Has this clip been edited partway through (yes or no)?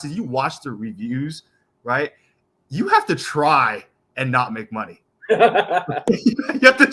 no